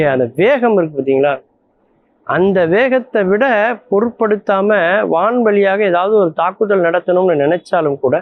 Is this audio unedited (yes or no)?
yes